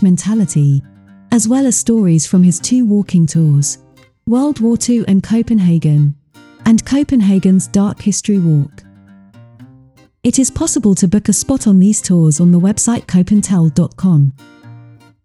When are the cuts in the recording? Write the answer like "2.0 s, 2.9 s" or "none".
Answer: 14.4 s